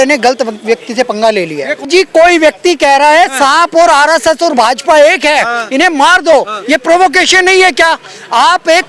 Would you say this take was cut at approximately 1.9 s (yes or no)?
yes